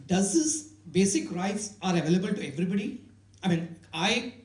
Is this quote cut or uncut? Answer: uncut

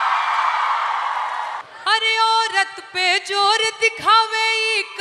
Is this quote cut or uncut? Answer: cut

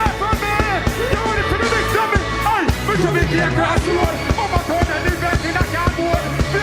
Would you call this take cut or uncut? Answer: uncut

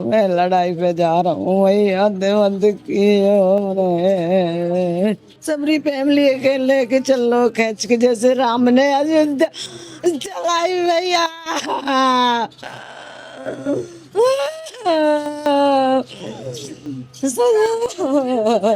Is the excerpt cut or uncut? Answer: cut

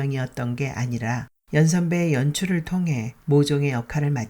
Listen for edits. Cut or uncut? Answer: cut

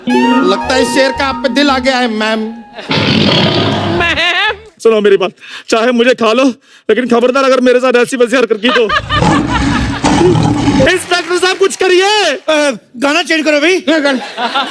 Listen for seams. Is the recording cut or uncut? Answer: uncut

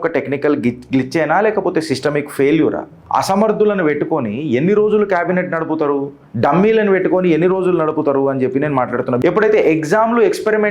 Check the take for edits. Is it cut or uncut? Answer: cut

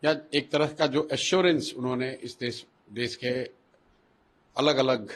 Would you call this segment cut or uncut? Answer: uncut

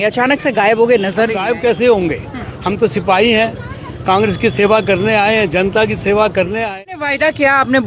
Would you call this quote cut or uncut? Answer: cut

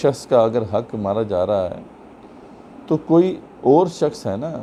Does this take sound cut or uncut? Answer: uncut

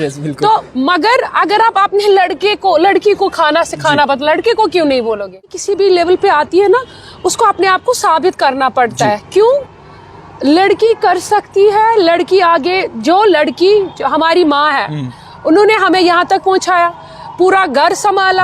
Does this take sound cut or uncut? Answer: cut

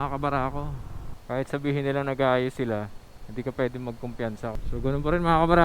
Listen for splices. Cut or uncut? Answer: cut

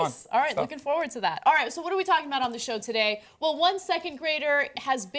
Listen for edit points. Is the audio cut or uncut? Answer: uncut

